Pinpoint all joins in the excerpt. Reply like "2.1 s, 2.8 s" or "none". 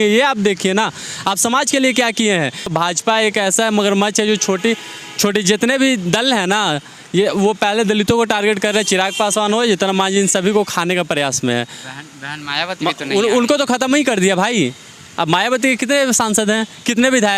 2.7 s